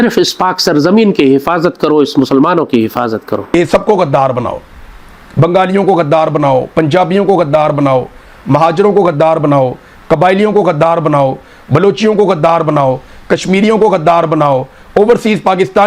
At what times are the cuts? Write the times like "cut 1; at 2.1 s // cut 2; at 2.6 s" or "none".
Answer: cut 1; at 3.5 s